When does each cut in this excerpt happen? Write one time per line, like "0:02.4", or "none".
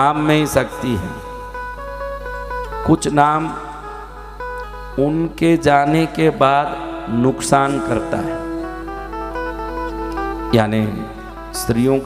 none